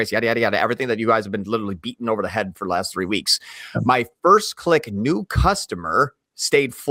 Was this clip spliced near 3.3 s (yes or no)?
no